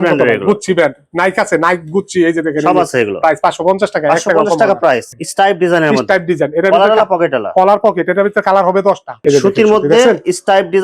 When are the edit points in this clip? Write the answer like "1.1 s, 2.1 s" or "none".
5.1 s, 9.1 s